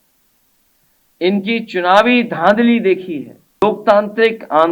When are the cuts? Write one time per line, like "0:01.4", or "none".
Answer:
0:03.6